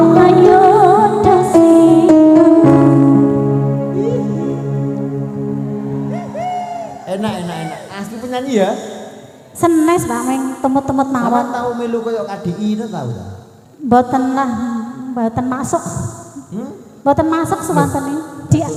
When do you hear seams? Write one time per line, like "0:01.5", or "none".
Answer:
none